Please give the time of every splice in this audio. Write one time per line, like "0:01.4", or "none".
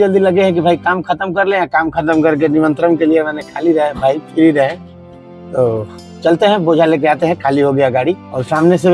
none